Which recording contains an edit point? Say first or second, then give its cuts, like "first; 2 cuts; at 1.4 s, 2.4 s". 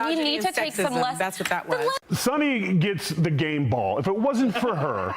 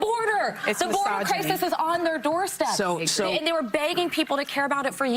first; 1 cut; at 2.0 s